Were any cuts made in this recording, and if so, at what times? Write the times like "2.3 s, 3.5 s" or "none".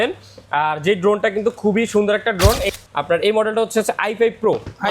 2.7 s

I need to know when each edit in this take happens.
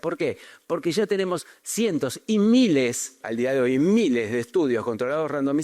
3.2 s

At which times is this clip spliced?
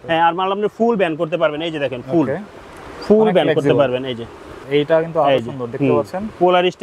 4.6 s

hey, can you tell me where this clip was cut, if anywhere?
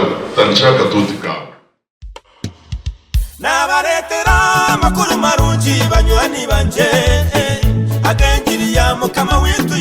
1.3 s

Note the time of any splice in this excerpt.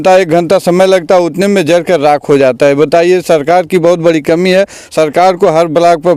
none

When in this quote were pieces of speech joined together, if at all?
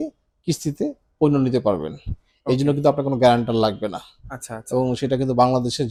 none

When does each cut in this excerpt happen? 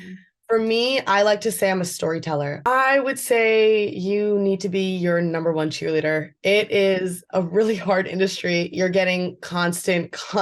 2.5 s

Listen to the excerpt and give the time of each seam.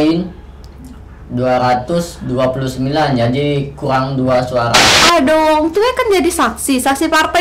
5.0 s

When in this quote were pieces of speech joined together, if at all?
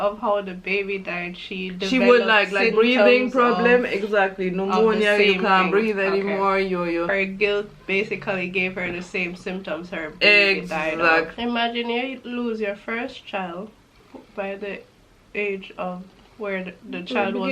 7.1 s, 11.3 s

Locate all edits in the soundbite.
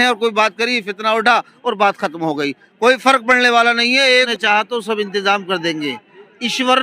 4.2 s

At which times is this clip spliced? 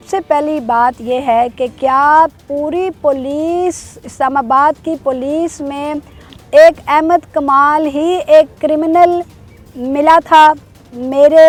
none

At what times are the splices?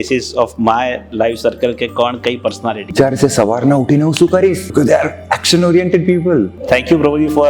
2.9 s, 4.6 s, 6.6 s

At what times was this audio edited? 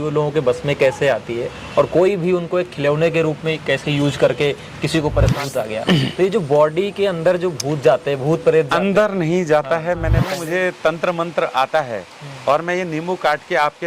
5.4 s, 10.3 s

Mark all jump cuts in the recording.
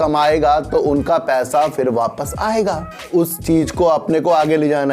3.1 s

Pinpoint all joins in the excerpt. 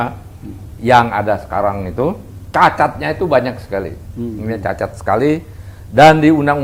none

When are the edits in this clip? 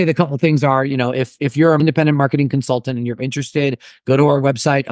1.8 s

